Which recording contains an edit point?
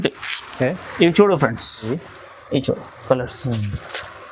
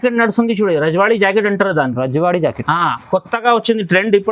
first; 1 cut; at 1.9 s

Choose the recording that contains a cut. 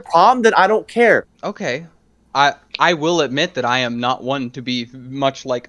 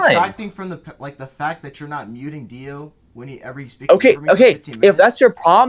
first; 1 cut; at 1.3 s

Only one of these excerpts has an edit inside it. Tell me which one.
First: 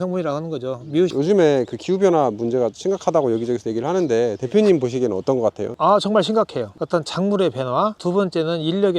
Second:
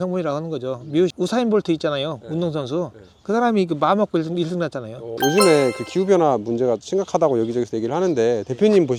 first; 1 cut; at 1.1 s

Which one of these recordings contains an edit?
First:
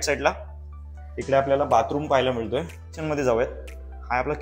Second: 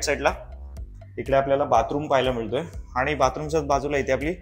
first; 1 cut; at 2.9 s

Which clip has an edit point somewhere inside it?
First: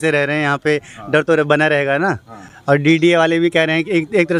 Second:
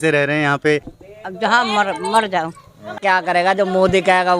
second; 2 cuts; at 0.9 s, 3.0 s

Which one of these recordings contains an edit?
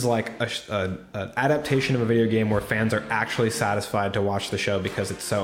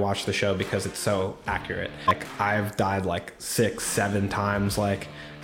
second; 1 cut; at 2.1 s

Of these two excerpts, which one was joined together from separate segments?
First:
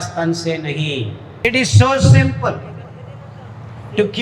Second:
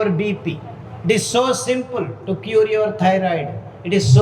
first; 1 cut; at 1.2 s

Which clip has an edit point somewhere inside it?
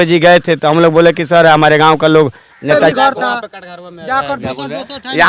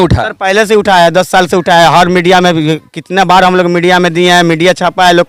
first; 1 cut; at 2.8 s

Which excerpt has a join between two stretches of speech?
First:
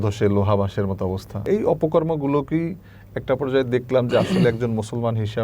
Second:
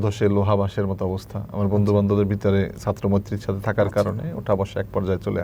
first; 1 cut; at 1.4 s

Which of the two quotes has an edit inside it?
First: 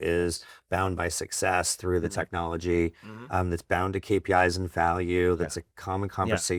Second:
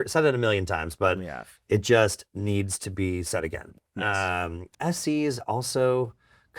second; 1 cut; at 4.7 s

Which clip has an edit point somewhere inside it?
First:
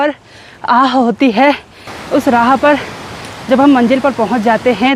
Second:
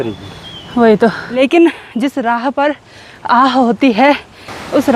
second; 1 cut; at 1.2 s

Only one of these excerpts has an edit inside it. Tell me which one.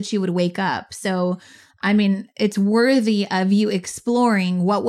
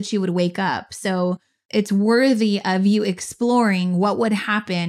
second; 1 cut; at 1.6 s

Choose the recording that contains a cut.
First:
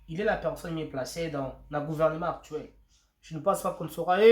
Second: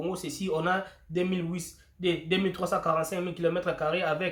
first; 1 cut; at 3.4 s

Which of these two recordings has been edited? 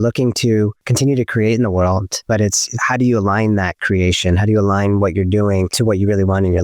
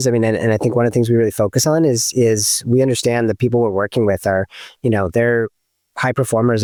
first; 3 cuts; at 0.9 s, 2.3 s, 5.7 s

